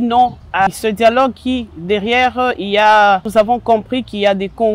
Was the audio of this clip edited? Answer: yes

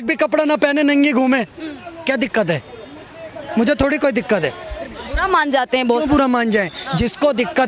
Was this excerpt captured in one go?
yes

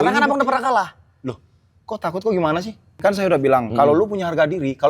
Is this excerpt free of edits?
no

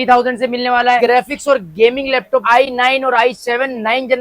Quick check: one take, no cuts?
no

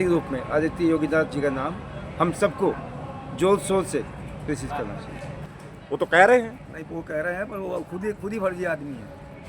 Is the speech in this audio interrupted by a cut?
yes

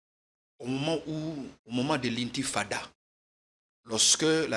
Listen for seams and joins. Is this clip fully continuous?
yes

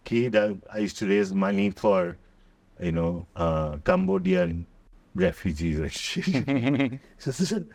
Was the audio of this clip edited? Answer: no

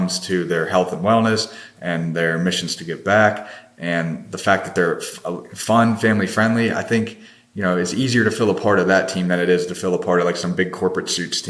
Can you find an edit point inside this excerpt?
no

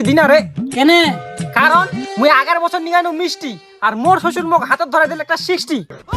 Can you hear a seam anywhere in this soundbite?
no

